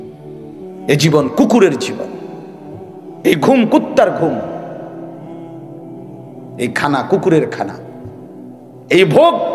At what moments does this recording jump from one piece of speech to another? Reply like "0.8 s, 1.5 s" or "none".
0.8 s, 4.9 s, 6.3 s

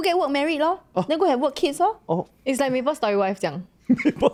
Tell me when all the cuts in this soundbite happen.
none

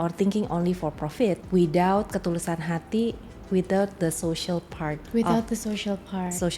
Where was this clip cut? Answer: 1.4 s, 5.0 s

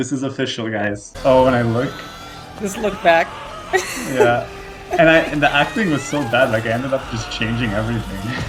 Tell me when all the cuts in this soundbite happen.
1.1 s

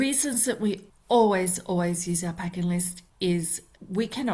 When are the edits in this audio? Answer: 0.9 s, 3.3 s

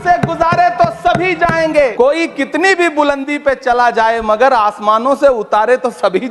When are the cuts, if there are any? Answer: 1.9 s

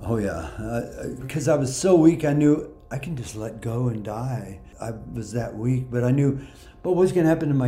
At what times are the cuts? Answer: 1.3 s, 4.7 s

